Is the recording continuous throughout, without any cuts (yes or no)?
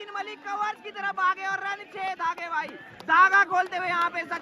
yes